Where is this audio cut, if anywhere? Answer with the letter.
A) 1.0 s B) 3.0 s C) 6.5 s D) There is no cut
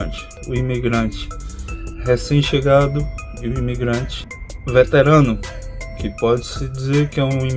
D